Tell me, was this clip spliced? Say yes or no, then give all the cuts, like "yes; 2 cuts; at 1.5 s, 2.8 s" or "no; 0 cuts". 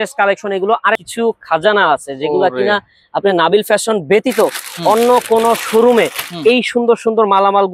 yes; 1 cut; at 1.0 s